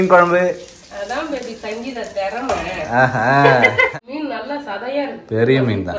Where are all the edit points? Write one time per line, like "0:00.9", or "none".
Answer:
0:03.9